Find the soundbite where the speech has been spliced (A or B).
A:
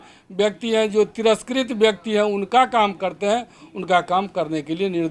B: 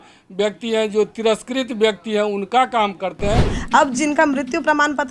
B